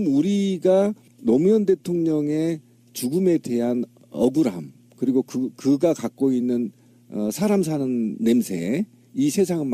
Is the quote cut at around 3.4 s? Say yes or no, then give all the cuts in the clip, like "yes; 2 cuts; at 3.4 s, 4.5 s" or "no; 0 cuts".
no; 1 cut; at 5.8 s